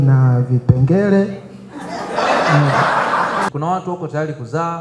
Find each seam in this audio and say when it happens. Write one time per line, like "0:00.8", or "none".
0:03.5